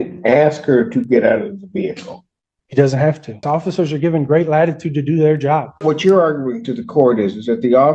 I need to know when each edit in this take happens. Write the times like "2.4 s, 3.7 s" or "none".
3.4 s, 5.8 s